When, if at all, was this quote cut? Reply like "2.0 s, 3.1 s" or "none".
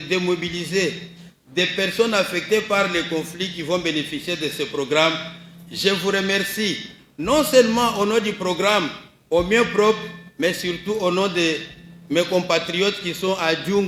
none